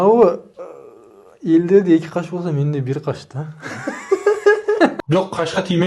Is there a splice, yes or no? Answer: yes